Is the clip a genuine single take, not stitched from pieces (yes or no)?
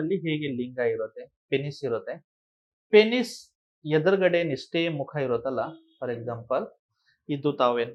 yes